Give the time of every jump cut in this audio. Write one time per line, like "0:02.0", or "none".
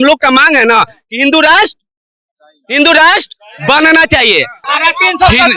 0:04.6